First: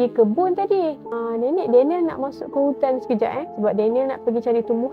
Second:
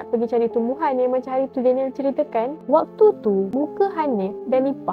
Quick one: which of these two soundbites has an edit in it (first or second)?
second